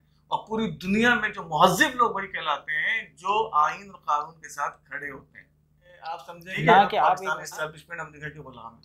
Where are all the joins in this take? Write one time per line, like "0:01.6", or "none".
0:07.2